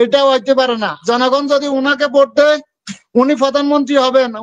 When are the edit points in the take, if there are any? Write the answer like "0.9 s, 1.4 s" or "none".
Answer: 1.0 s